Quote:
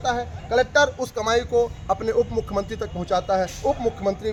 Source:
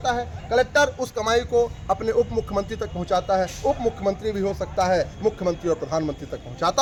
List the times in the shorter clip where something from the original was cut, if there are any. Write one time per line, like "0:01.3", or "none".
none